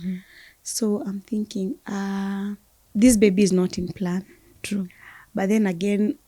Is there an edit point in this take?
yes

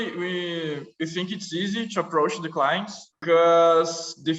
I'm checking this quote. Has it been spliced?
yes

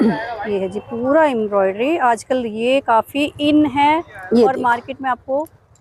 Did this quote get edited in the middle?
no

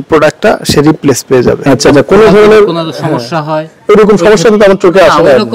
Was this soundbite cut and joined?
yes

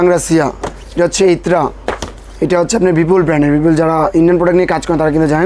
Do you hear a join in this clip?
no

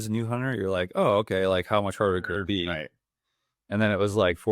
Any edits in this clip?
no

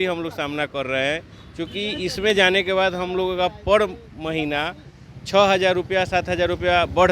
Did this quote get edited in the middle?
no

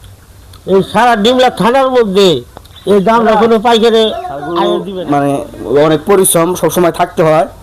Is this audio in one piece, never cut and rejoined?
no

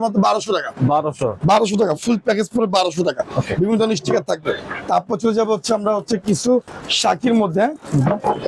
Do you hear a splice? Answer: no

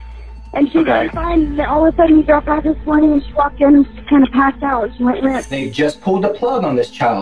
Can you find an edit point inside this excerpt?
yes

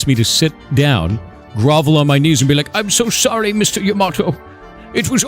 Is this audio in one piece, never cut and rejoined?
yes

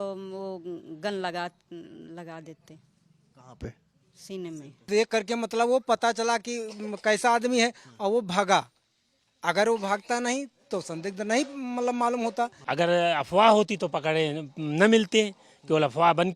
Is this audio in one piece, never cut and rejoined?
no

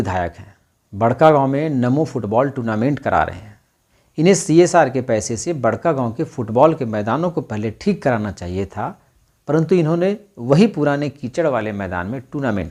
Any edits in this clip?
no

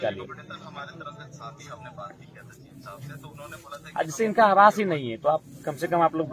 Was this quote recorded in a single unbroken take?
yes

